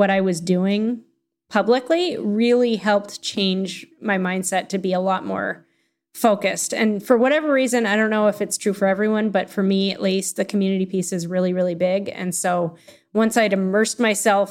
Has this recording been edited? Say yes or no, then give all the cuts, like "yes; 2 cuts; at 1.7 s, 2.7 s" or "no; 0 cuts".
no; 0 cuts